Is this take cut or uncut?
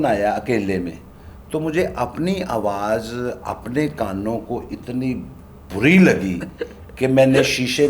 uncut